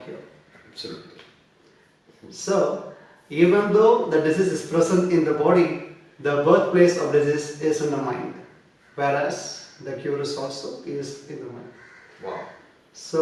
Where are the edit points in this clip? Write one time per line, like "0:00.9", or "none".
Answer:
none